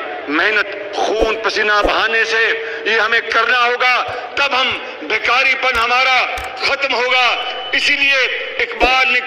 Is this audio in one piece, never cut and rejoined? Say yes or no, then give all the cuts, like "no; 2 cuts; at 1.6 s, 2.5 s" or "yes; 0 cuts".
yes; 0 cuts